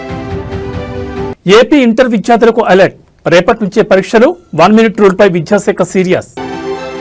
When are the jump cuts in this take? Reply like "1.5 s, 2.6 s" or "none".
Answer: 1.3 s

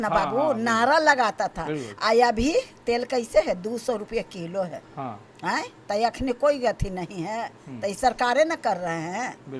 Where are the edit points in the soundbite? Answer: none

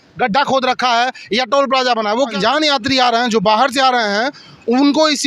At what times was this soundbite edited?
2.4 s

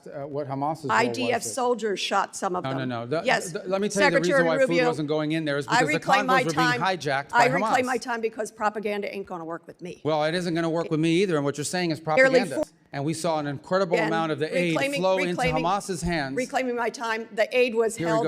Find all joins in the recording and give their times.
12.6 s

